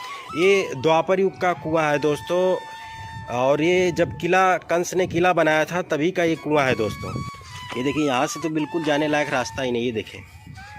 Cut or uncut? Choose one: cut